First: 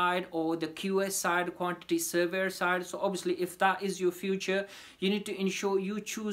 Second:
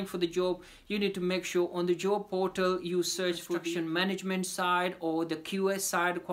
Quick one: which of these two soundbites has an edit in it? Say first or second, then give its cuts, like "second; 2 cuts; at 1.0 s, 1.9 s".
second; 1 cut; at 3.7 s